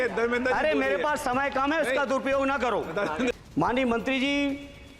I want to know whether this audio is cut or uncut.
cut